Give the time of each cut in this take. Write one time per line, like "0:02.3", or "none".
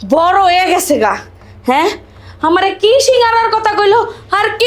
none